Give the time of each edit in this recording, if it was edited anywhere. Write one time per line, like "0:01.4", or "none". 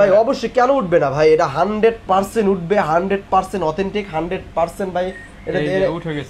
none